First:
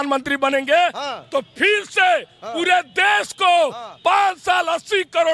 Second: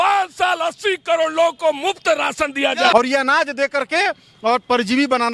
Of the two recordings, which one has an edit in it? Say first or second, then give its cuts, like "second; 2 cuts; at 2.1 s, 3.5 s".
second; 1 cut; at 2.9 s